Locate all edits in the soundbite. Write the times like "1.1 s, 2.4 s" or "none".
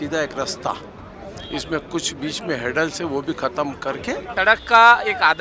4.3 s

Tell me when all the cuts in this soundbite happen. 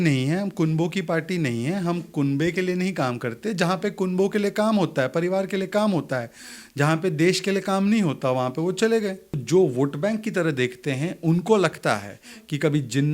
9.4 s

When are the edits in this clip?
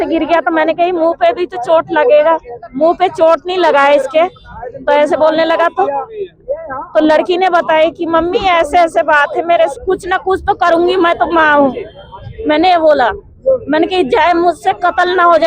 9.7 s

